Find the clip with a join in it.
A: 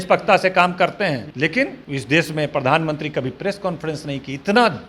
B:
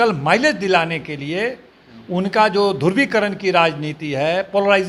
A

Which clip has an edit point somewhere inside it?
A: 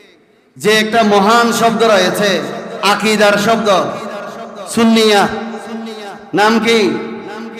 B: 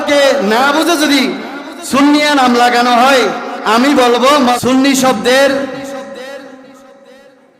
B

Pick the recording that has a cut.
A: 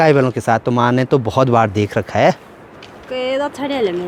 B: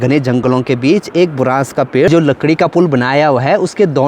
B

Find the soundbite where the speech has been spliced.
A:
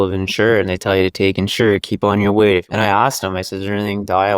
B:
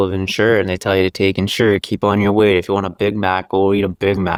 A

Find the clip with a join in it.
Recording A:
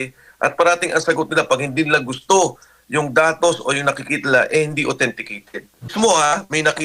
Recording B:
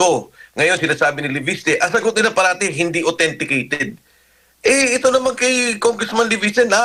A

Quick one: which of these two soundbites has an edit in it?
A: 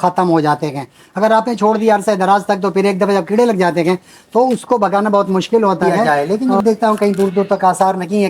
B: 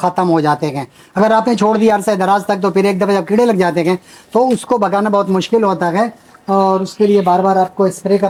A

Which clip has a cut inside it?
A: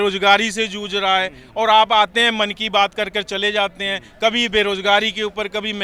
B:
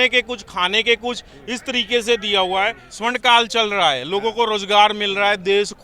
B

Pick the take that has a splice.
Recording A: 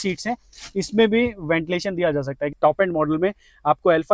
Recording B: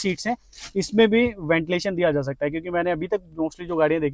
A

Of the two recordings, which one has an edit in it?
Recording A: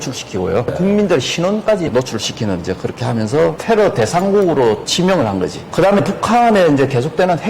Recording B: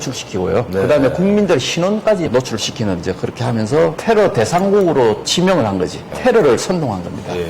A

